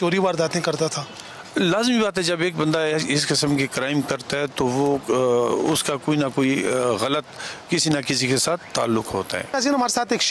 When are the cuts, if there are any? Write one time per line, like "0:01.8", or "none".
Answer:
none